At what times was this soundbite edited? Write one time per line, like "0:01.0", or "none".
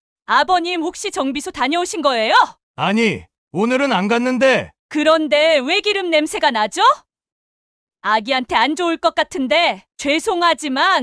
0:02.6